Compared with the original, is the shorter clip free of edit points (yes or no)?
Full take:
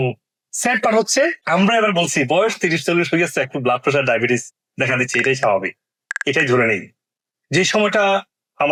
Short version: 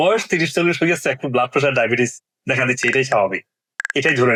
yes